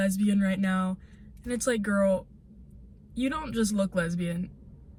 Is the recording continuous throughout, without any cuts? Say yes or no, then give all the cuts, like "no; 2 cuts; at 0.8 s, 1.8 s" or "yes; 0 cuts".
yes; 0 cuts